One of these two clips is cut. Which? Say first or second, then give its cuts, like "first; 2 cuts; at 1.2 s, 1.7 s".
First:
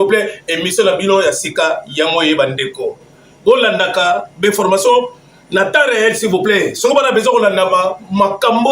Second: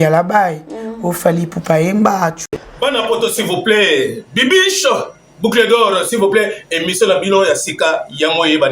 second; 1 cut; at 2.4 s